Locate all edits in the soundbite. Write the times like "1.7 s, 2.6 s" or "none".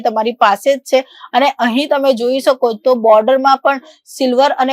none

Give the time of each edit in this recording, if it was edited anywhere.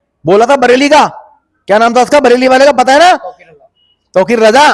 none

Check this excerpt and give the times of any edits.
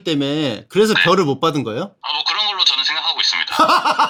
none

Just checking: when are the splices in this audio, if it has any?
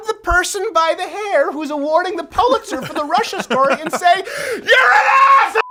none

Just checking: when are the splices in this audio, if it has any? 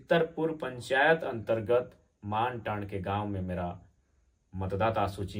none

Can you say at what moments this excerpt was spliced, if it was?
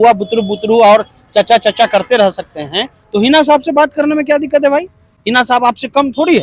none

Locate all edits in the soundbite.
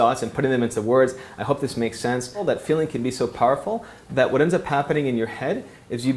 2.4 s

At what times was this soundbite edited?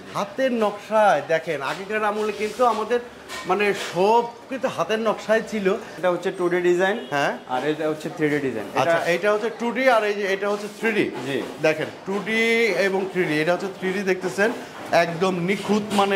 5.9 s

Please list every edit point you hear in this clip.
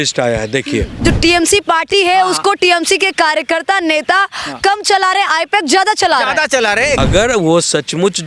1.0 s, 7.0 s

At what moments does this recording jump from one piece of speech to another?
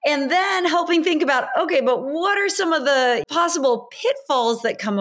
3.2 s

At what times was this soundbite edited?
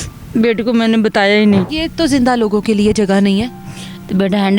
1.7 s

